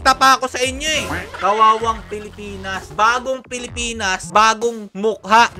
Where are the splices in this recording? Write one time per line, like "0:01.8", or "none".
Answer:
0:01.2
0:02.8
0:04.2